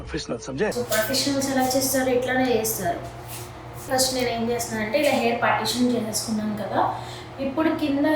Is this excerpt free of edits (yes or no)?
no